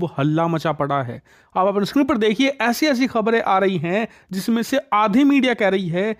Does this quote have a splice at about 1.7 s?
no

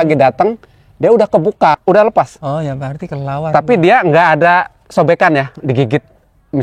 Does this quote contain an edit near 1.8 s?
yes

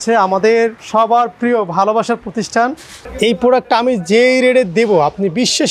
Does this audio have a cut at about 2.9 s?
yes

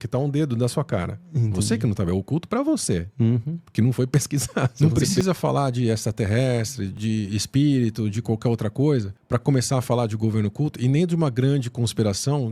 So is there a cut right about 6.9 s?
yes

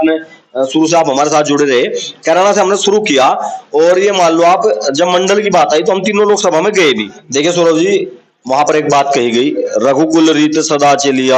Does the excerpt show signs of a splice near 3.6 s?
no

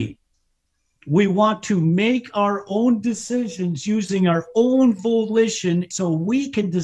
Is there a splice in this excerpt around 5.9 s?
yes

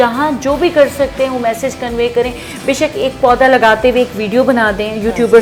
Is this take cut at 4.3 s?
no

